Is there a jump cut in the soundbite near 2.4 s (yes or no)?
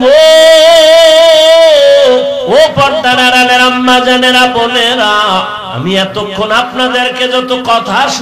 yes